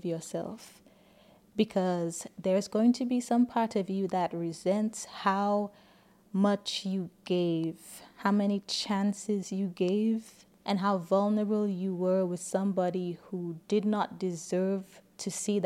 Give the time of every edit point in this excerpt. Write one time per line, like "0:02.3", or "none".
none